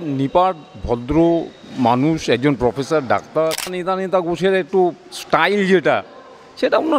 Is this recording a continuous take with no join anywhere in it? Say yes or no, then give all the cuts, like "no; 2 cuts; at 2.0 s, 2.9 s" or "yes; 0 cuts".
no; 1 cut; at 3.8 s